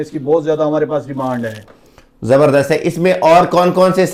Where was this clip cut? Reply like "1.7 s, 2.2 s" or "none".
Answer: none